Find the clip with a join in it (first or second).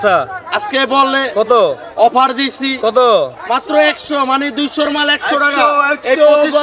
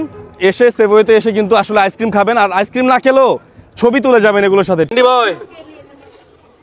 second